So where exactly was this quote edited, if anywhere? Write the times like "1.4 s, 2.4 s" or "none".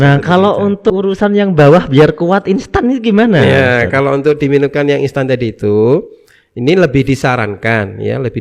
0.9 s